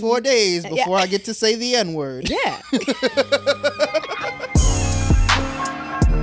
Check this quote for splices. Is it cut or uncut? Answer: cut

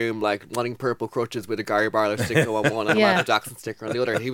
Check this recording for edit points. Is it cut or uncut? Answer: uncut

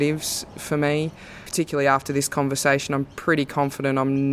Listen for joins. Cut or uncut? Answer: cut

